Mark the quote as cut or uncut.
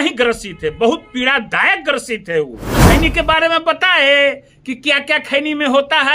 cut